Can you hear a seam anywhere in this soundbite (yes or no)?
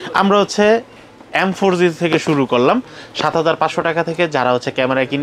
no